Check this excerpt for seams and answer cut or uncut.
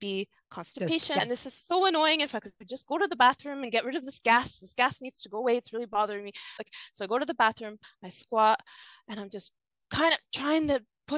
cut